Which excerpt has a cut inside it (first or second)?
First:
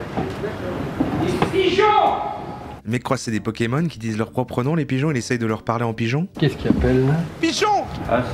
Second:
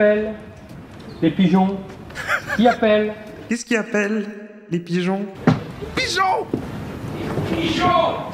second